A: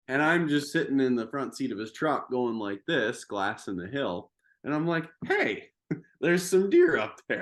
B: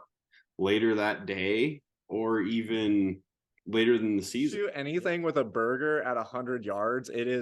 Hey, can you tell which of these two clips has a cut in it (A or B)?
B